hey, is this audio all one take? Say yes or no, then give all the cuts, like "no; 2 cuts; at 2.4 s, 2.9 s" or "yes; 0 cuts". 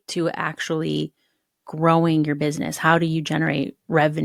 yes; 0 cuts